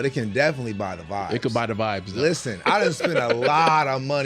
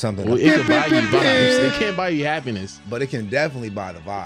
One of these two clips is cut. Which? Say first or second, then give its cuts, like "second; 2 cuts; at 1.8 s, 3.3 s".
first; 1 cut; at 2.6 s